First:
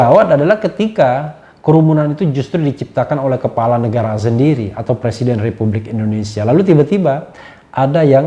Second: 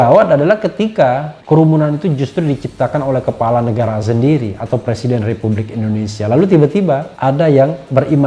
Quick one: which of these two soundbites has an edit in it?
second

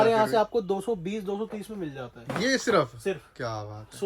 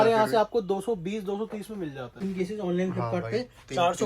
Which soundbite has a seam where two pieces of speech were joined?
second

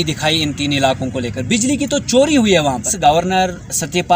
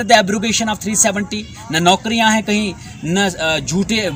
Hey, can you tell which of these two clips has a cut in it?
first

